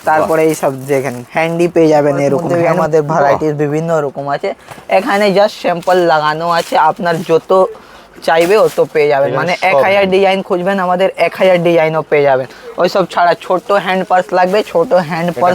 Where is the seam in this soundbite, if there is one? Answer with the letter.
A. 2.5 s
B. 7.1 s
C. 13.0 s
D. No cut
A